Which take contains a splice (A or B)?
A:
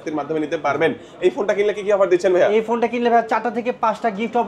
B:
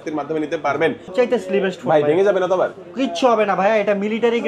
B